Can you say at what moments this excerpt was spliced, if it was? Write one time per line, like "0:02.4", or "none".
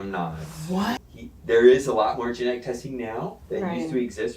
0:01.1